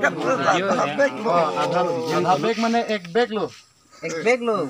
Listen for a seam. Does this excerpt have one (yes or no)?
no